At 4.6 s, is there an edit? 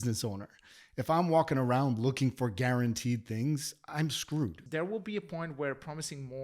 yes; 1 cut; at 4.6 s

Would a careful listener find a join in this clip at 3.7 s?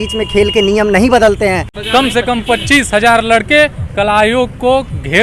no; 1 cut; at 1.7 s

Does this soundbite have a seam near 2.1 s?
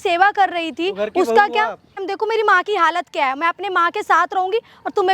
yes; 1 cut; at 2.1 s

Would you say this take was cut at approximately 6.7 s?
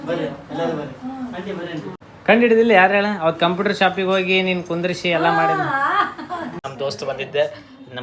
yes; 2 cuts; at 2.0 s, 6.7 s

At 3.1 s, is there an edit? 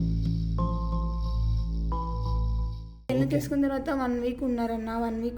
yes; 1 cut; at 3.1 s

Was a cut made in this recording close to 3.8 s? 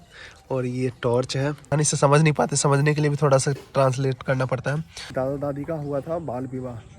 no; 2 cuts; at 1.7 s, 5.1 s

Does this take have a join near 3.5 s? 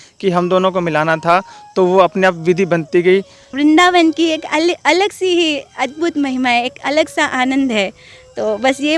yes; 1 cut; at 3.5 s

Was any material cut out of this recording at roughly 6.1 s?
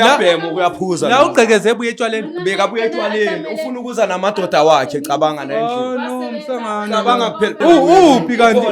no; 1 cut; at 7.6 s

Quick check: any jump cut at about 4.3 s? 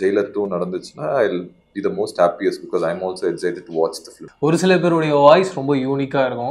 yes; 1 cut; at 4.3 s

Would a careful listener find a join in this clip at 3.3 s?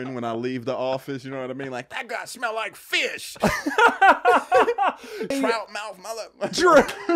yes; 2 cuts; at 3.3 s, 5.3 s

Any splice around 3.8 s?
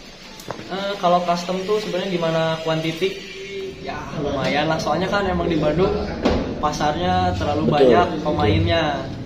yes; 1 cut; at 3.8 s

